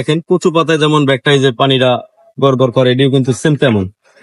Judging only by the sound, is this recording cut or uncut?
uncut